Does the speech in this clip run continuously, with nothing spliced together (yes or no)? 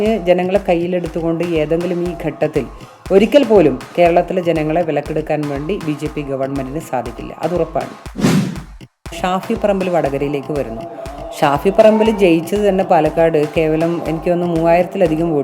no